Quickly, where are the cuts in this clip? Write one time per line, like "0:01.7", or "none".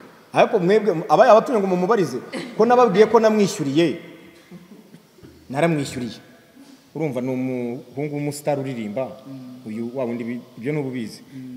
none